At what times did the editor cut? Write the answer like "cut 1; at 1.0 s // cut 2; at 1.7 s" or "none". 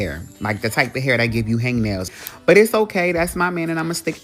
cut 1; at 2.2 s